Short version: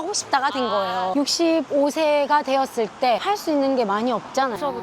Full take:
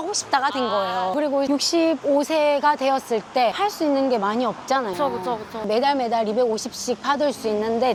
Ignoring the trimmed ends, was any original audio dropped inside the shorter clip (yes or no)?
yes